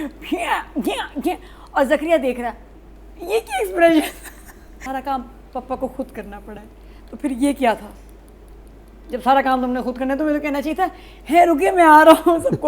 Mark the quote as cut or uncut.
cut